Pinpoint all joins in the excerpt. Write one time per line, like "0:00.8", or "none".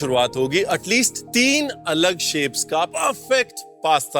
0:01.2
0:02.9